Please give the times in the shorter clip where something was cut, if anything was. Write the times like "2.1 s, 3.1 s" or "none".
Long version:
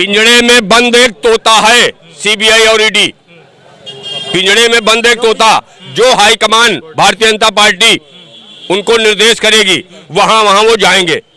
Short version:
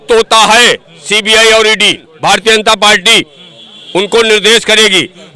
2.1 s